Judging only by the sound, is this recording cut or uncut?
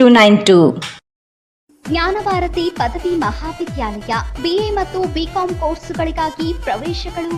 uncut